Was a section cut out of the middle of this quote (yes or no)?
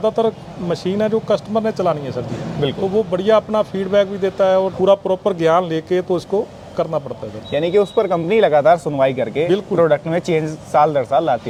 no